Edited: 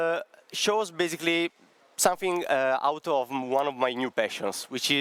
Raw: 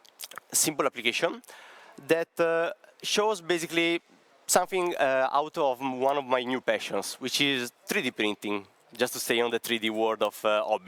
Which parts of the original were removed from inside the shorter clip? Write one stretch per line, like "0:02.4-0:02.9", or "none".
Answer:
none

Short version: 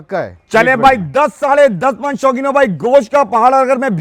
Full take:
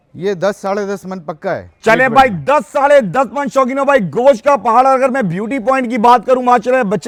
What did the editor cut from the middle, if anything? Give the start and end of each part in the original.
none

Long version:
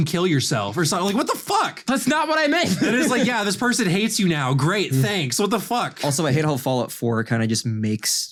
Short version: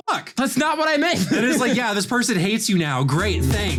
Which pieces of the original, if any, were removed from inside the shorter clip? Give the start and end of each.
none

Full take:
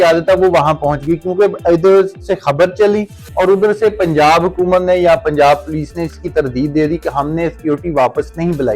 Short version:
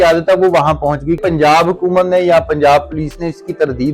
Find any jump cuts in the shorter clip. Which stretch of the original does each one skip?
0:01.2-0:04.0

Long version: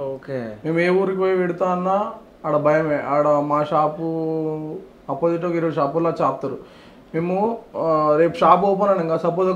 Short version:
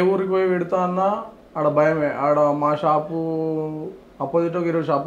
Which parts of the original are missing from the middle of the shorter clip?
none

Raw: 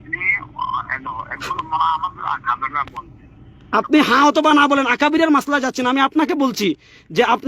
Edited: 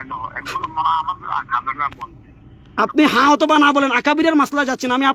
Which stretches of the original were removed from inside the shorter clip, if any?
none

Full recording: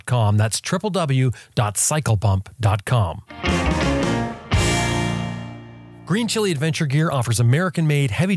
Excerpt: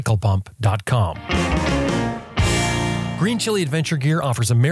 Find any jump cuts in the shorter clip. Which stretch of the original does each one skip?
0:03.2-0:03.3
0:05.3-0:06.0

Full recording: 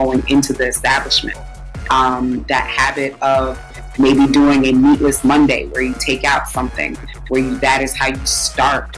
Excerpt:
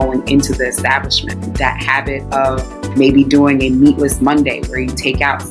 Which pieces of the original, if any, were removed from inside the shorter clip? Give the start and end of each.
0:01.5-0:02.4
0:03.6-0:03.8

